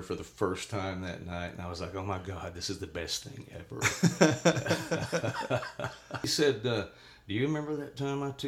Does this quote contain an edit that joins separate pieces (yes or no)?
yes